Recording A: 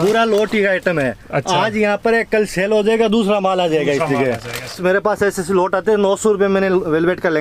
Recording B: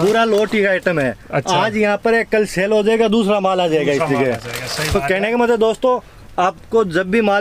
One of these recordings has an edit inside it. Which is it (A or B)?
A